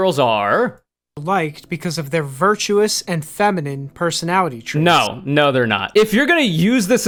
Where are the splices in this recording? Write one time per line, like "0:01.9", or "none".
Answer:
none